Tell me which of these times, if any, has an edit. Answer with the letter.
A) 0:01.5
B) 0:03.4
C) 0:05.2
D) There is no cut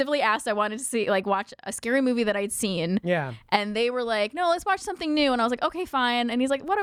D